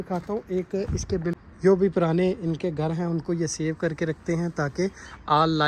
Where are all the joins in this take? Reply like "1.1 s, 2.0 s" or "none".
1.4 s